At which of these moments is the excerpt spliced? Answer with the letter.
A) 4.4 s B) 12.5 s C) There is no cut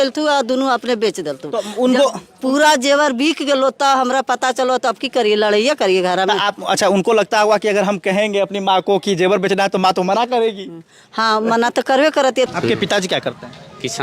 B